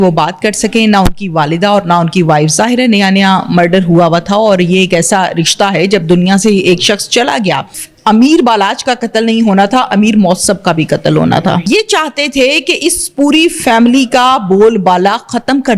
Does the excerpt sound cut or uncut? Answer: cut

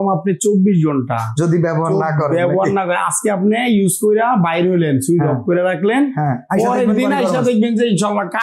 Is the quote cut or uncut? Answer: uncut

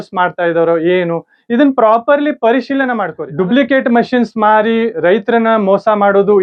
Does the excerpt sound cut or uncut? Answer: uncut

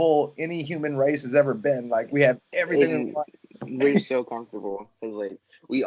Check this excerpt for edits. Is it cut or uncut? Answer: uncut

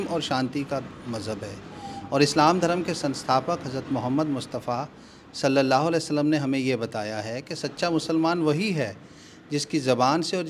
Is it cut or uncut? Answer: uncut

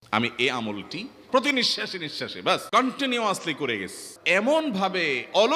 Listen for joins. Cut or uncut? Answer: cut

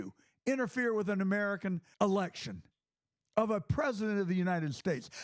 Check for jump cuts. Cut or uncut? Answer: cut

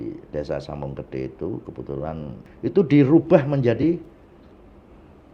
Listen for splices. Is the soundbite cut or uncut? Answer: cut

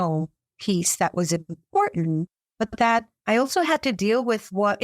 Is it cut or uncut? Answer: cut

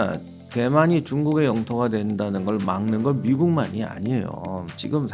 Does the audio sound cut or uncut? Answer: uncut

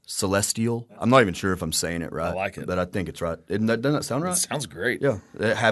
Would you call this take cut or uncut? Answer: uncut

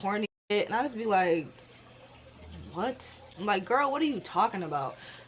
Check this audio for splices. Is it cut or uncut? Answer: uncut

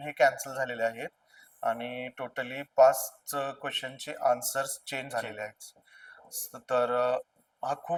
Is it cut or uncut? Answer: uncut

